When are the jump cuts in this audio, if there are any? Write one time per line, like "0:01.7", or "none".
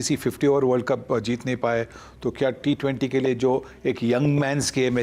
none

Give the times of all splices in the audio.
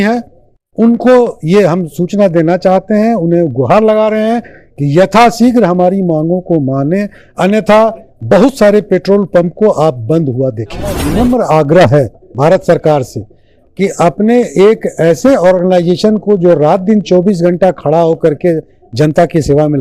0:11.0

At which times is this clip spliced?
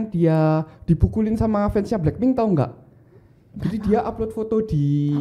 none

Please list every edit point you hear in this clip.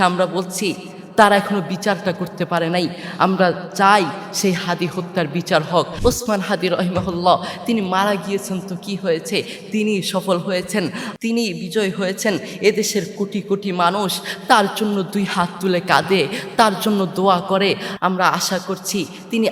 0:05.9
0:11.0
0:17.9

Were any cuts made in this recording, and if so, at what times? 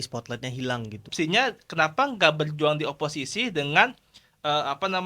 0:01.0

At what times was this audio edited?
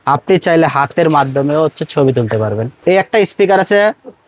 0:02.8

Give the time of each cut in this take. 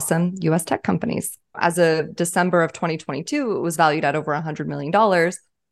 0:01.6

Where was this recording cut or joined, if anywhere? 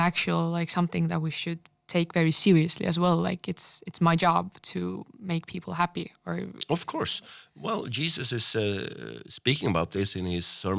none

